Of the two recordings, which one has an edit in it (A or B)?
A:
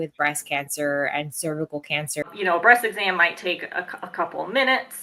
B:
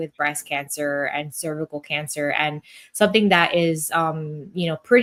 A